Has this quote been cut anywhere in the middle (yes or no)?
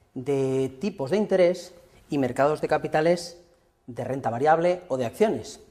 no